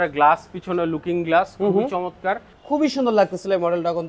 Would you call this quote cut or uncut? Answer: cut